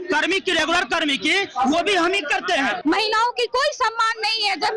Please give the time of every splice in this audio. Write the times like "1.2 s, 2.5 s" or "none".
2.8 s

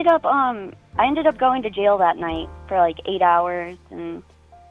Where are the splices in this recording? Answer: none

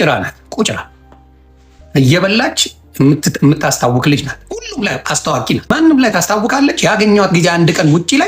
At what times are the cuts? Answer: 5.7 s

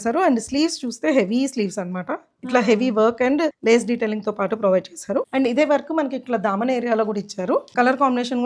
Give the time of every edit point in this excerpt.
3.6 s, 5.3 s, 7.7 s

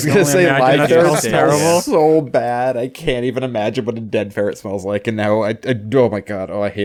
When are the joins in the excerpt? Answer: none

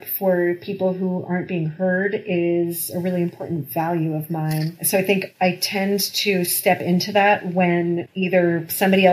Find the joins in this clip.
4.8 s, 8.1 s

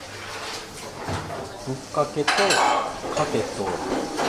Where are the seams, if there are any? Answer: 1.6 s

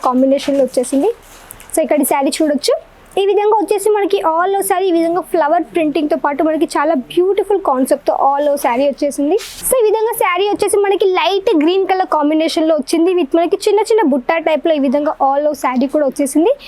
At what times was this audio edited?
9.5 s

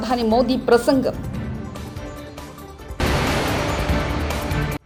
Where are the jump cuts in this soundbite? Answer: none

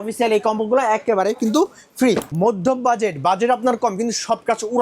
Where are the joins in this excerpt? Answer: 2.3 s

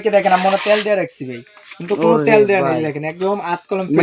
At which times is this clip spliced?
none

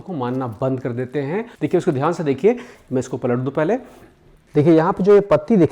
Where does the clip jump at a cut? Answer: 1.5 s

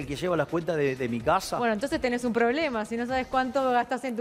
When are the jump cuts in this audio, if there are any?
none

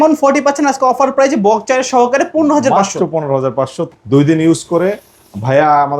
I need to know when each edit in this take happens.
3.8 s

